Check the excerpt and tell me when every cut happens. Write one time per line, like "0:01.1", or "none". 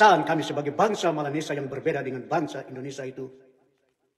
none